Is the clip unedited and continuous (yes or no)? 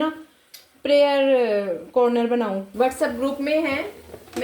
no